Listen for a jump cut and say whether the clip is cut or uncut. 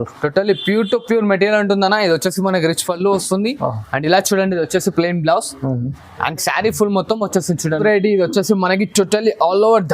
cut